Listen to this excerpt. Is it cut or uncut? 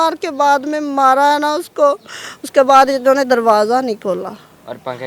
uncut